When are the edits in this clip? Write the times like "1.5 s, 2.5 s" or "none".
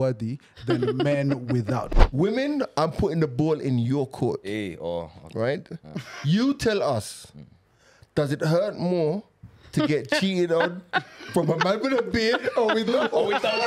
1.9 s